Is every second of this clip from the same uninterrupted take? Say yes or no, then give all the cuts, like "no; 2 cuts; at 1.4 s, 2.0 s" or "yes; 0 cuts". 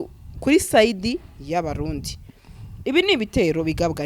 yes; 0 cuts